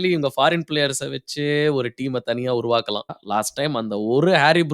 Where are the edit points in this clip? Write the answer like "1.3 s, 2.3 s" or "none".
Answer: 3.2 s